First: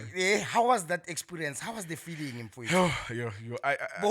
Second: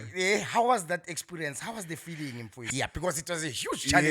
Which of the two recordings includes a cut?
second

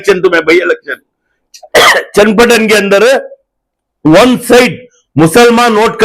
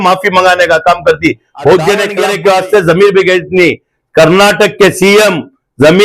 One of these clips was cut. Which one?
second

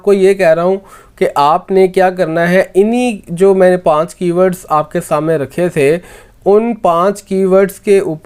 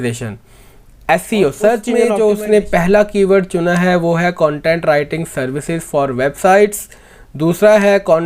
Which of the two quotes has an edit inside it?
second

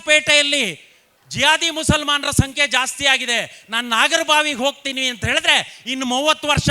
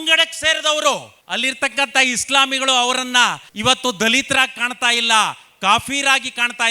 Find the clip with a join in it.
second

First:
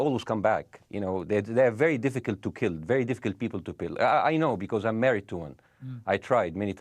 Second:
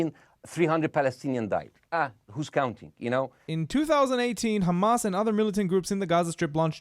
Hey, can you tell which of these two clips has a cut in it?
second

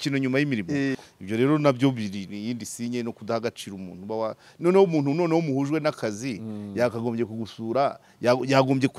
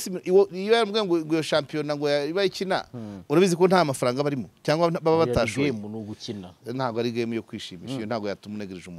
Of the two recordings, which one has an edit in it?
first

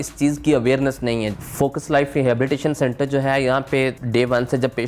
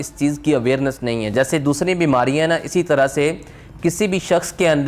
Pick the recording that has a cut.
first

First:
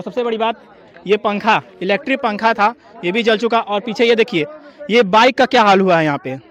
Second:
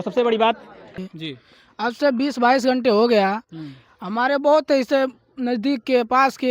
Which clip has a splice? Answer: second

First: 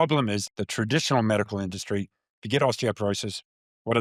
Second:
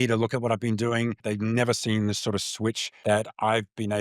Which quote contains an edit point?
second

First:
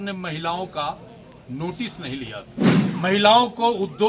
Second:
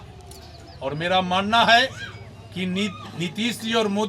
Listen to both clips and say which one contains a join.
first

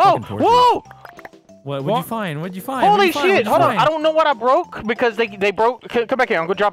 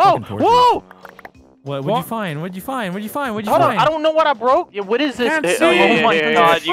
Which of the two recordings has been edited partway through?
second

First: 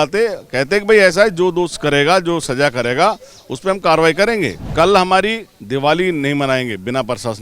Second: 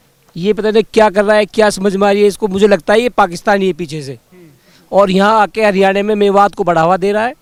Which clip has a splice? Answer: first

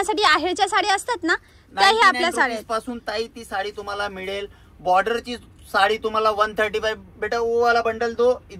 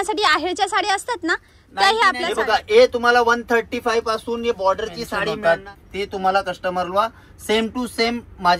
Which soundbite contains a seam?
second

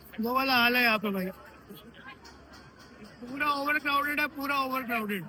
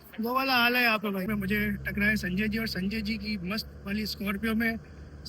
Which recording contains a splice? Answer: second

